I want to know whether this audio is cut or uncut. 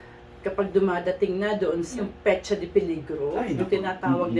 cut